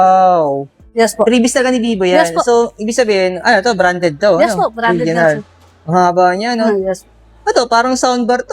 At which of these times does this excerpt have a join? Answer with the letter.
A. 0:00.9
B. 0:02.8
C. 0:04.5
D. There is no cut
A